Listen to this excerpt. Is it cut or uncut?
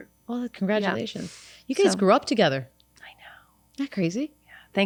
uncut